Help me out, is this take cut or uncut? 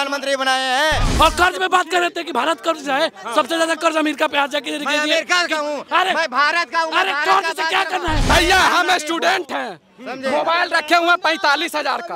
cut